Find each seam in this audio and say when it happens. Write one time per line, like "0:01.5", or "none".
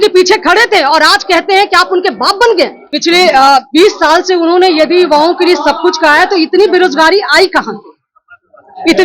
0:02.9